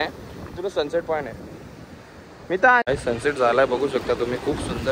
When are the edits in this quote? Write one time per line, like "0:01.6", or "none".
0:02.8